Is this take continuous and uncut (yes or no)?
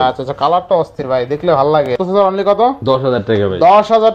no